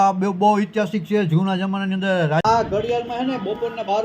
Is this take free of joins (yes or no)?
no